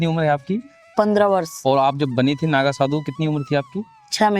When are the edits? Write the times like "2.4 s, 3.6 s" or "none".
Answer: none